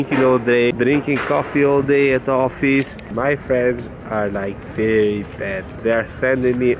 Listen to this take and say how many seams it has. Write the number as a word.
two